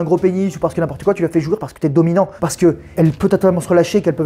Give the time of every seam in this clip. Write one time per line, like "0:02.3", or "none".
0:02.9